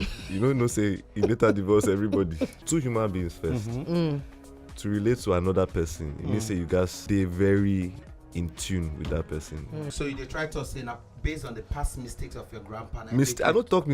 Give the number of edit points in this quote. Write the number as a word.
three